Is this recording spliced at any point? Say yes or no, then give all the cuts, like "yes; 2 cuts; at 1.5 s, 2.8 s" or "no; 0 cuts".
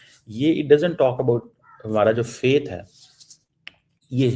no; 0 cuts